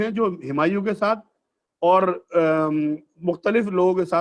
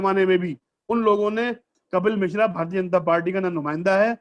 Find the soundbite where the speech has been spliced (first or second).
second